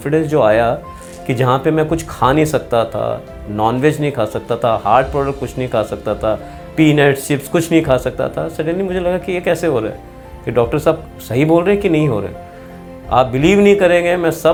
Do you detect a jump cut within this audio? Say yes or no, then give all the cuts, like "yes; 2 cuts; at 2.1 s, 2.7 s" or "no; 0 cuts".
no; 0 cuts